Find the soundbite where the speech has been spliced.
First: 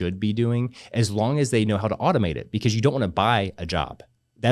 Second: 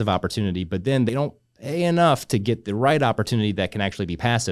second; 1 cut; at 1.1 s

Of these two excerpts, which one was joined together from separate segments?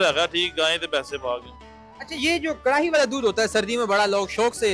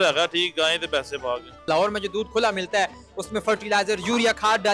second; 1 cut; at 1.7 s

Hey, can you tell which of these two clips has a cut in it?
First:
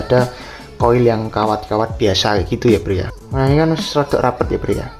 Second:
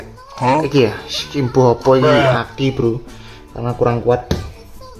first; 1 cut; at 3.2 s

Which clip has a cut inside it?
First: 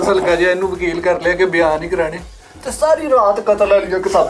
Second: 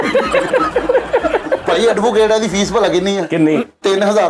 second; 1 cut; at 1.6 s

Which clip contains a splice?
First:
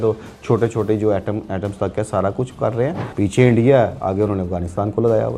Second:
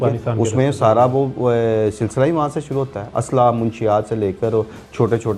first; 1 cut; at 3.0 s

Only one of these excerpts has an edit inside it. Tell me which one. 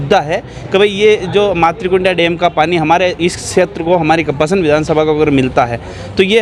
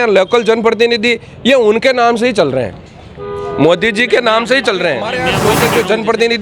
second; 1 cut; at 5.4 s

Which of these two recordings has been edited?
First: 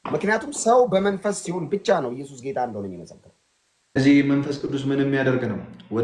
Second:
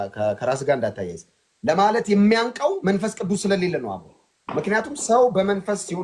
first; 1 cut; at 4.0 s

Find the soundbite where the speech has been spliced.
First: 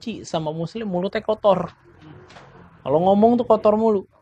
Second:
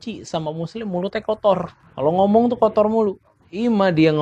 second; 1 cut; at 1.8 s

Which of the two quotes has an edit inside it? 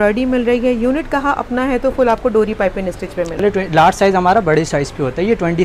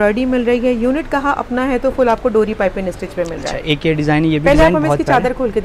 first; 1 cut; at 3.4 s

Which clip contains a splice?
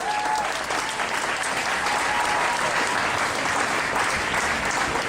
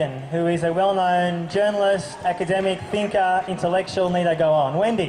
first; 1 cut; at 2.8 s

